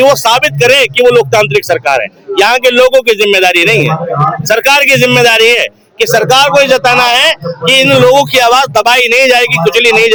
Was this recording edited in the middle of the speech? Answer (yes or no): no